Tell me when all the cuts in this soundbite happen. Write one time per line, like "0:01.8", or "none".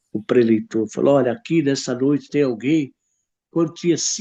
none